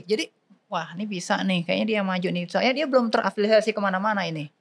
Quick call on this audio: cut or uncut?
uncut